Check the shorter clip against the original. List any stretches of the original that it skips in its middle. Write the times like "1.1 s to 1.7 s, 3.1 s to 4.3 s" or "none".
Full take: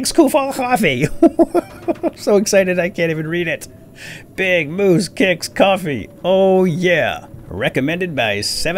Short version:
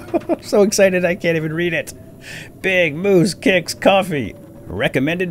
6.1 s to 7.2 s

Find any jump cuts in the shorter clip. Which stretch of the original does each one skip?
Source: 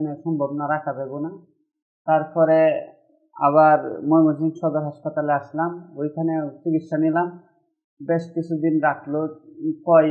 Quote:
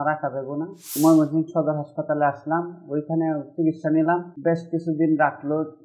1.5 s to 3.9 s, 7.4 s to 7.9 s

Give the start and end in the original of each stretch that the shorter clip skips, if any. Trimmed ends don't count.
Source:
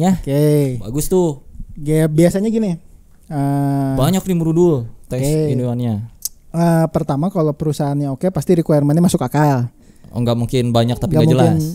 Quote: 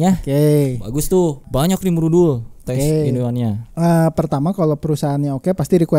1.5 s to 4.0 s, 6.1 s to 6.4 s

